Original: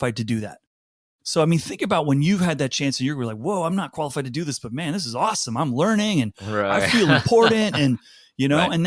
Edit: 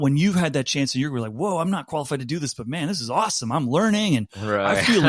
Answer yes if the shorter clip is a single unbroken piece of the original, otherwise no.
yes